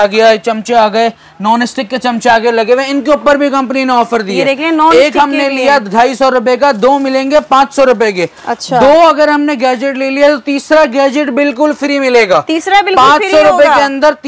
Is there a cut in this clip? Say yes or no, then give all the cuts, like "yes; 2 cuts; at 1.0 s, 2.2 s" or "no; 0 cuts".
no; 0 cuts